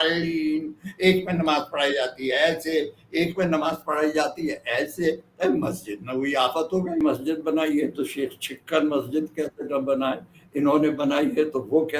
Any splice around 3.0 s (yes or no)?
no